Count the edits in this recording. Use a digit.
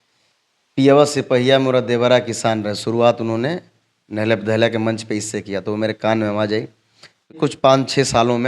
1